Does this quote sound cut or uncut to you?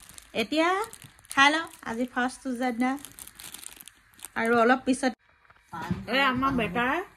cut